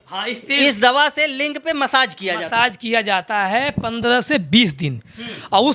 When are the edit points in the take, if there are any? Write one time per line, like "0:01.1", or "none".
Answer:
none